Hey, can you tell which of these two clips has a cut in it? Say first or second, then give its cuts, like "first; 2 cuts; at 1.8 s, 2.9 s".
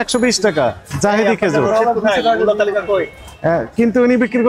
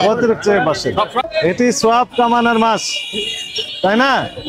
second; 1 cut; at 1.2 s